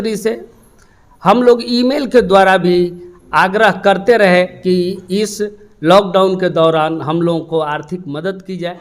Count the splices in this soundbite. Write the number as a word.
zero